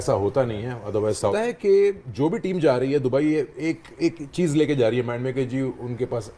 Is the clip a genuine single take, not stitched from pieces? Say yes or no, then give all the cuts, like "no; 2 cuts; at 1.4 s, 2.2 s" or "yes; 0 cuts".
no; 1 cut; at 1.3 s